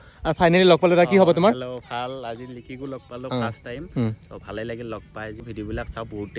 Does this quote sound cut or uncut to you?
cut